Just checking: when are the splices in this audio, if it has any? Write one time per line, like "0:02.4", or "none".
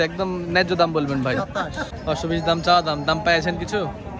0:01.9